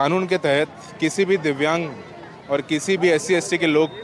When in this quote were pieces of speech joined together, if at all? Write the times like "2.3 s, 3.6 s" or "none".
none